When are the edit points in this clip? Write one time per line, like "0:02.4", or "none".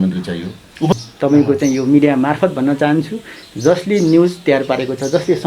0:00.9